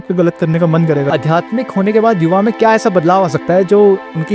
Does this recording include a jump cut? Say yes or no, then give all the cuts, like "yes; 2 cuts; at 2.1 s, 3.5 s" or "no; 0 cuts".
yes; 1 cut; at 1.1 s